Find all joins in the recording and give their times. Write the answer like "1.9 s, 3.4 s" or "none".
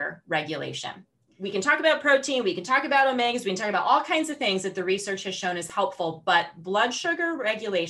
5.7 s